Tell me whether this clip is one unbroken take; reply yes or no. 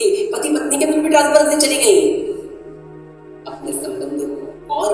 no